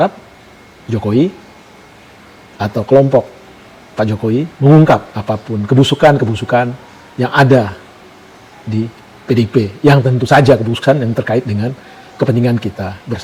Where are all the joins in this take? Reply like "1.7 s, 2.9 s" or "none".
none